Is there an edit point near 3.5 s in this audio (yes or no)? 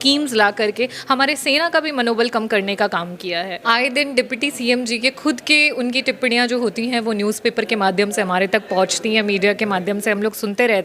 yes